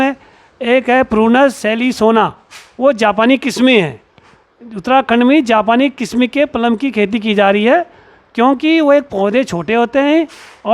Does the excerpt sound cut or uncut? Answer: uncut